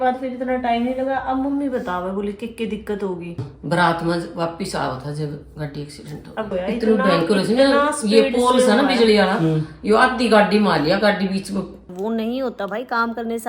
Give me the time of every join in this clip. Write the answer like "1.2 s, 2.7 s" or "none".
3.5 s, 6.5 s, 11.8 s

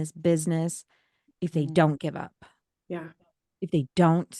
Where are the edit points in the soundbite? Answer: none

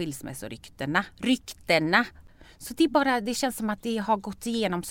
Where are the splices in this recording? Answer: 2.2 s

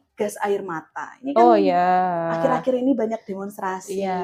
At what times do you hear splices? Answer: none

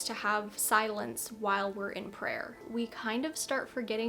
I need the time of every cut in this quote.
2.5 s

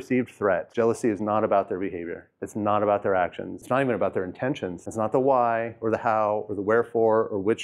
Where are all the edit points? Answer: 3.5 s, 4.8 s

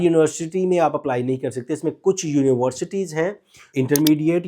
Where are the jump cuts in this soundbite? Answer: 3.6 s

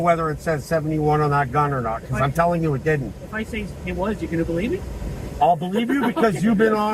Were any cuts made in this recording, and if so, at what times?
none

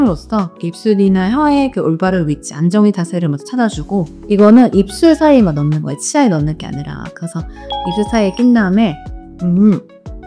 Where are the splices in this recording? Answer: 4.1 s

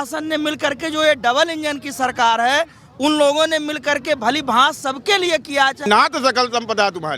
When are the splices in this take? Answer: 5.8 s

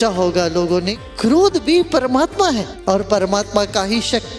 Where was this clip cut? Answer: none

